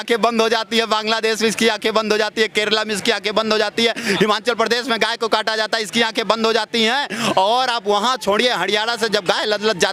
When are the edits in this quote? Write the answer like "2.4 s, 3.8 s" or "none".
none